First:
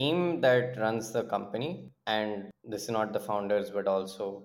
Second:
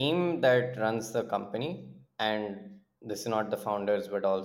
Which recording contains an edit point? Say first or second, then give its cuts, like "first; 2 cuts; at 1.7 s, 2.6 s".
first; 2 cuts; at 1.9 s, 2.5 s